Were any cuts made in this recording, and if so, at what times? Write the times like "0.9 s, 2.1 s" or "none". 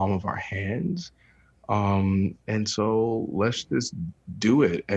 none